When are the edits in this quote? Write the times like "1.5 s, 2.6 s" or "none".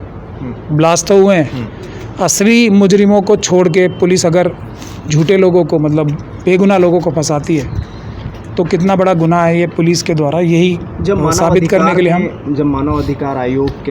none